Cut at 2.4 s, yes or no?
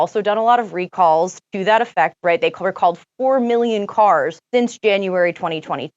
no